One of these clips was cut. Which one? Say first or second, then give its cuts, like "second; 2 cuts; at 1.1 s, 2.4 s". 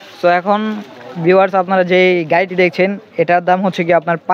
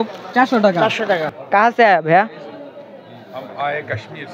second; 1 cut; at 1.3 s